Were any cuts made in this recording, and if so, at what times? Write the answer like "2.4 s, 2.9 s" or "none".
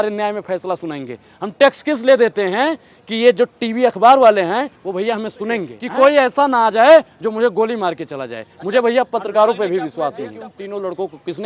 5.7 s, 10.5 s